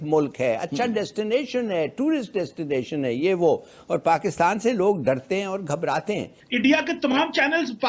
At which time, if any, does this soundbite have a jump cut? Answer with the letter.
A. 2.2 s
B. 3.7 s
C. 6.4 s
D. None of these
C